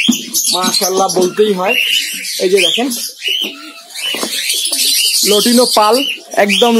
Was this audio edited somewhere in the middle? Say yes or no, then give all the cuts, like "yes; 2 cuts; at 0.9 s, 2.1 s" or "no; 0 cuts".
no; 0 cuts